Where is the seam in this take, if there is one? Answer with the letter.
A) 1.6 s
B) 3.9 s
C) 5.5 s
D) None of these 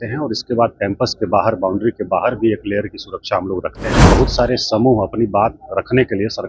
B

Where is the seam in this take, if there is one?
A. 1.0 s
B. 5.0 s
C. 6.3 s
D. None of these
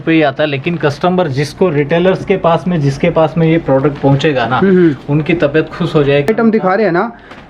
C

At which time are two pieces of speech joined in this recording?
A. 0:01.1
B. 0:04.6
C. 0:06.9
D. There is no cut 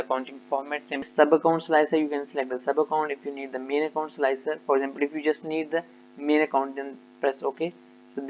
A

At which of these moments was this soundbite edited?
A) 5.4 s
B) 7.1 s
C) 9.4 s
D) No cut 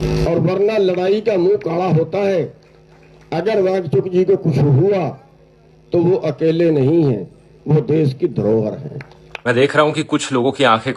C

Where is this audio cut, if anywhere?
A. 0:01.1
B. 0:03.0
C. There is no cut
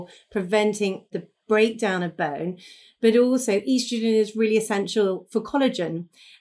A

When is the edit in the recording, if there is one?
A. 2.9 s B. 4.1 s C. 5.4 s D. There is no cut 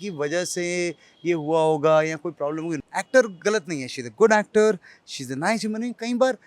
A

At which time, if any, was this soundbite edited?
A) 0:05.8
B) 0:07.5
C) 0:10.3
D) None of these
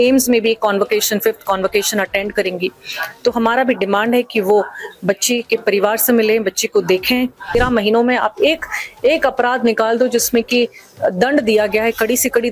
B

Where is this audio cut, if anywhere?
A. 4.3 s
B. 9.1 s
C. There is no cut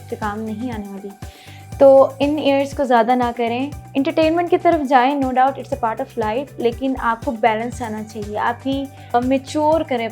B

